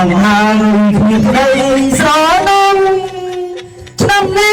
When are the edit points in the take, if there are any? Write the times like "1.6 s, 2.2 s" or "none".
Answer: none